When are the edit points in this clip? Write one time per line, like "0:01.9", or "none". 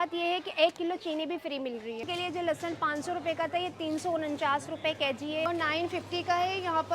0:02.1
0:05.5